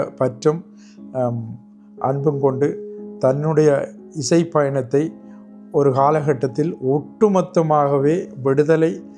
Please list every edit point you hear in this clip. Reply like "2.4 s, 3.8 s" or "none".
none